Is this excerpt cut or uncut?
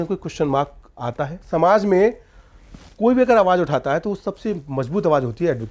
cut